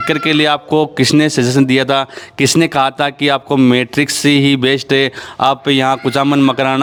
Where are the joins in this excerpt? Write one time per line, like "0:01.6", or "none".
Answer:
none